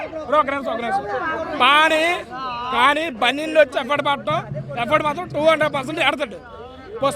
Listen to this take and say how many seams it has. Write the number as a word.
zero